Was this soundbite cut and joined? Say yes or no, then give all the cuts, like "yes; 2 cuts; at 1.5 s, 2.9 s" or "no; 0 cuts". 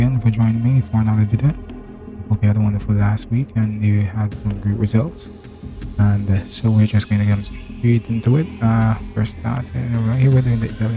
no; 0 cuts